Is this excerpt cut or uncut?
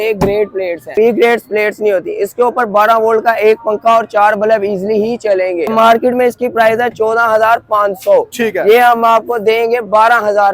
cut